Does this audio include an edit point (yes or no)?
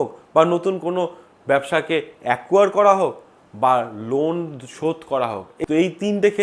no